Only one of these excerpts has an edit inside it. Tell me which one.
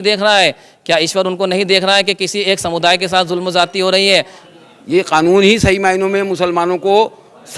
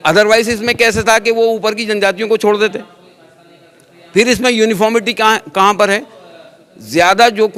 first; 1 cut; at 4.4 s

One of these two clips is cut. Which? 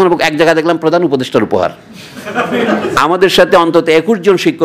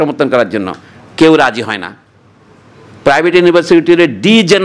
first; 1 cut; at 2.9 s

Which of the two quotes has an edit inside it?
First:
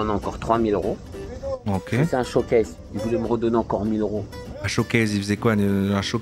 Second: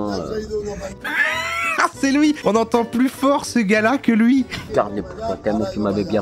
second; 1 cut; at 2.4 s

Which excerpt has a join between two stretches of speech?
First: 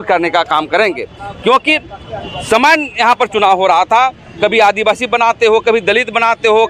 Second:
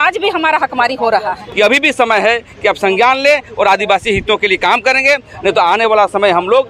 second; 1 cut; at 1.4 s

